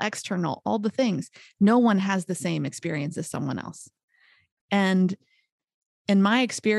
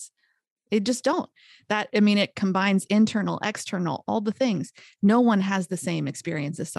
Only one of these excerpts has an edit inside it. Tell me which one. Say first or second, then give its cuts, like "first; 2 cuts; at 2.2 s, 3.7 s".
first; 1 cut; at 4.4 s